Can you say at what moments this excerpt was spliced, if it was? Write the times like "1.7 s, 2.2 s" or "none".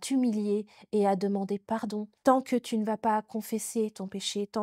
2.1 s